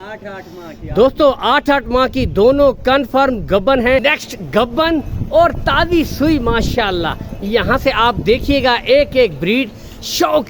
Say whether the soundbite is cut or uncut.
cut